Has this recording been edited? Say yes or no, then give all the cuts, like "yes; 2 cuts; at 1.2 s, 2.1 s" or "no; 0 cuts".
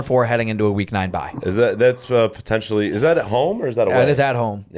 no; 0 cuts